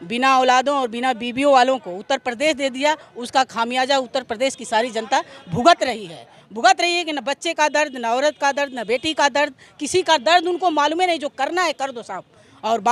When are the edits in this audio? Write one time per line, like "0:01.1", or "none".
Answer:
none